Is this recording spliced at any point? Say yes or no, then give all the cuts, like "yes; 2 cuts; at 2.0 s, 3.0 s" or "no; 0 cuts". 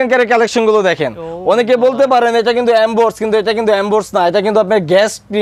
no; 0 cuts